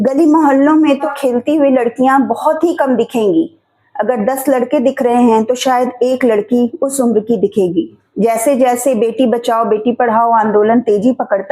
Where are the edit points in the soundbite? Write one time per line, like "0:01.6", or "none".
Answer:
0:01.1
0:08.0

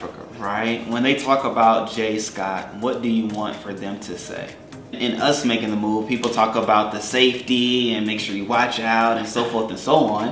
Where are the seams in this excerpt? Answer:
0:05.0

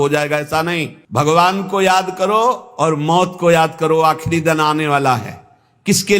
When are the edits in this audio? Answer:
0:01.0

